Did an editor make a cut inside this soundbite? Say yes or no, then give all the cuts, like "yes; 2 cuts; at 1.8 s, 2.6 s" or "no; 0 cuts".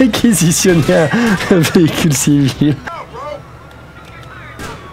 yes; 1 cut; at 2.8 s